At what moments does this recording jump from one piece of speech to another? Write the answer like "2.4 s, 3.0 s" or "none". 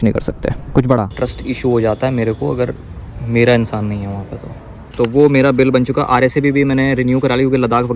1.1 s, 4.9 s